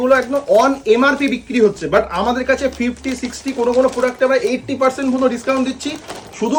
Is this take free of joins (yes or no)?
yes